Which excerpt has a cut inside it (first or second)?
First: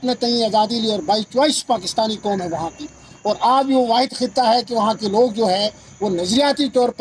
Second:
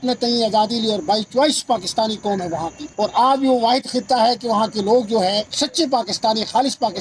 second